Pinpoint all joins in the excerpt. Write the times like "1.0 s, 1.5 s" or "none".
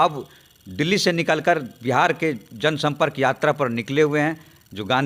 none